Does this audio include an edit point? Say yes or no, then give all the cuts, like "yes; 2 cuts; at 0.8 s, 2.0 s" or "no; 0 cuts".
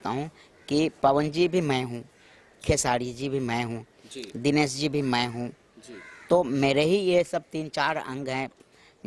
no; 0 cuts